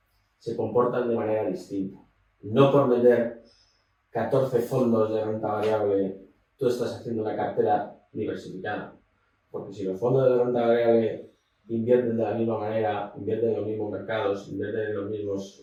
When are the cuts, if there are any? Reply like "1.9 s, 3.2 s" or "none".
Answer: none